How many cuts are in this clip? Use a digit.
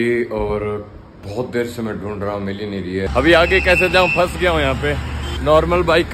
2